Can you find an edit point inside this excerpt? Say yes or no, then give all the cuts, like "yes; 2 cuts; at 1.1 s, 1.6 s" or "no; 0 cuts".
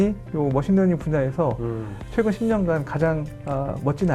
no; 0 cuts